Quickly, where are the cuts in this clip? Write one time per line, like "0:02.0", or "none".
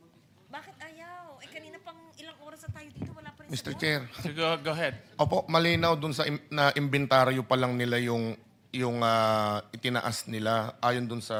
none